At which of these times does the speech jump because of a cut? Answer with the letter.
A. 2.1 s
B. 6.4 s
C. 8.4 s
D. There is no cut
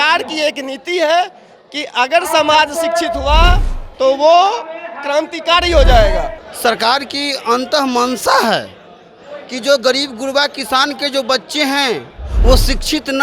B